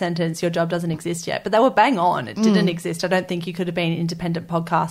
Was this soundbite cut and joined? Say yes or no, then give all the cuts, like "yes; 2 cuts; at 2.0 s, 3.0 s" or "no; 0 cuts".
no; 0 cuts